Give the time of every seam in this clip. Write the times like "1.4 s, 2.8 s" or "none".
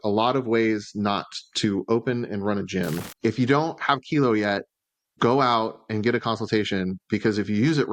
3.0 s